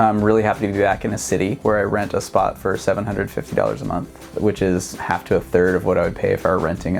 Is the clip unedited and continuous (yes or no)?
yes